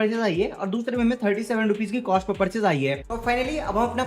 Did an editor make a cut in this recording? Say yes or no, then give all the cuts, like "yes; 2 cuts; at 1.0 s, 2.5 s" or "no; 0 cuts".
yes; 1 cut; at 3.0 s